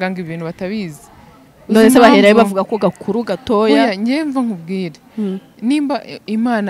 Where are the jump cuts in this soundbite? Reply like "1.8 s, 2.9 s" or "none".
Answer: none